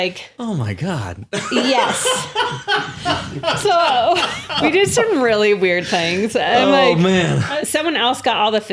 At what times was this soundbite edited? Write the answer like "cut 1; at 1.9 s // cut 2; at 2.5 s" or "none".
cut 1; at 4.5 s // cut 2; at 7.4 s

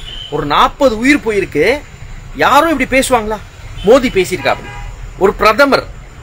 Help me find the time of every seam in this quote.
none

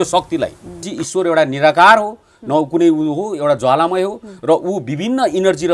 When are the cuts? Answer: cut 1; at 1.0 s

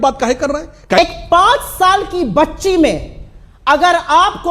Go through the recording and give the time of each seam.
cut 1; at 1.0 s

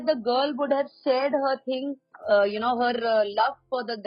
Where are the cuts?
cut 1; at 2.1 s

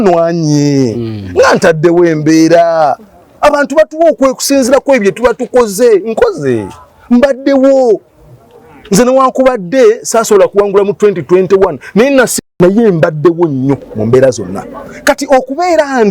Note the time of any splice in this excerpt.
cut 1; at 12.3 s

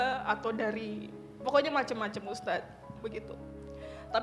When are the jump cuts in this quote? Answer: cut 1; at 2.9 s

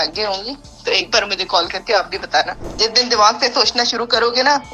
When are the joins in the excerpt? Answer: cut 1; at 2.6 s

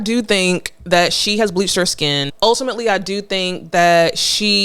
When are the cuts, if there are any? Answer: cut 1; at 2.3 s

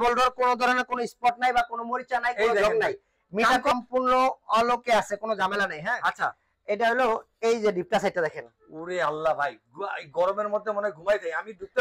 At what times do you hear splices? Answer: cut 1; at 3.7 s

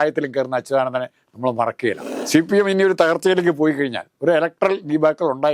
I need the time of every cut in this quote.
cut 1; at 2.1 s

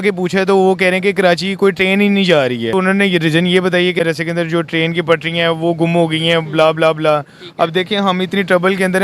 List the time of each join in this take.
cut 1; at 2.7 s // cut 2; at 4.0 s

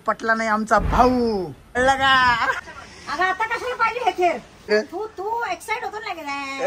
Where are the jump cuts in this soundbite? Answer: cut 1; at 1.8 s // cut 2; at 2.8 s // cut 3; at 4.7 s

